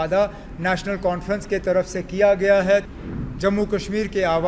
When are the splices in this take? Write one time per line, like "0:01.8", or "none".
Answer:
0:02.9